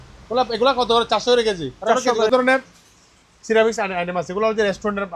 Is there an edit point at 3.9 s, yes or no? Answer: no